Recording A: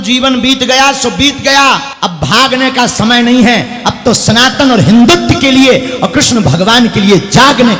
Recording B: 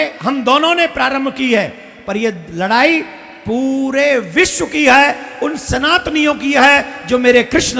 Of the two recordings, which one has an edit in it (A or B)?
A